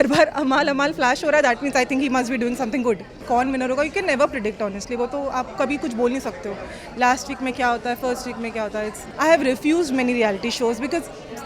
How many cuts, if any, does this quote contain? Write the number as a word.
two